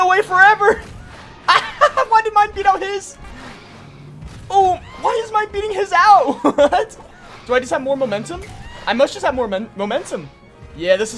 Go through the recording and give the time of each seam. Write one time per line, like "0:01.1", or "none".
none